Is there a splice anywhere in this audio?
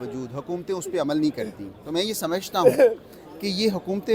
no; 0 cuts

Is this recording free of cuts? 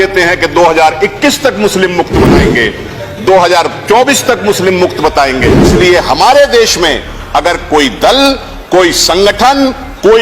no; 1 cut; at 5.7 s

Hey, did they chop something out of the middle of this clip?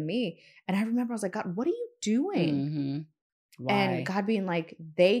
no; 0 cuts

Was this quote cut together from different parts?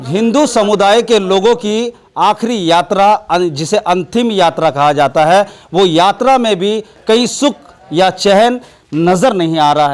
no; 0 cuts

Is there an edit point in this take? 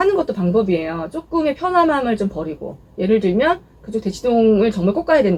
no; 0 cuts

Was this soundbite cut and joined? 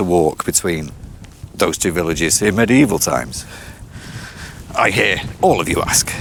no; 0 cuts

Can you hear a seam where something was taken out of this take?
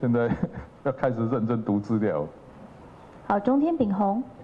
no; 0 cuts

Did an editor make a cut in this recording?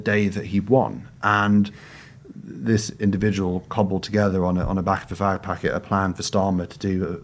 no; 0 cuts

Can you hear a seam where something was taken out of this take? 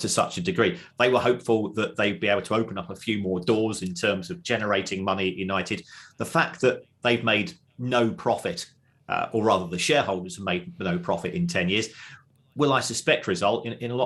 no; 0 cuts

